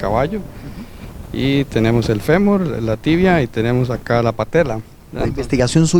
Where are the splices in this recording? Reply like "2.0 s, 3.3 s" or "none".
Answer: none